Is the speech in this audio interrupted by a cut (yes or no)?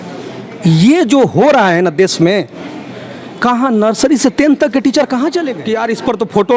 yes